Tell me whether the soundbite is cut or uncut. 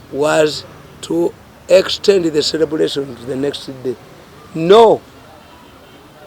uncut